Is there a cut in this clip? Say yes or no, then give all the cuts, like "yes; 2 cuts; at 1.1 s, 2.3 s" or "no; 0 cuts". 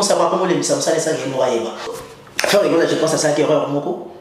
yes; 1 cut; at 1.9 s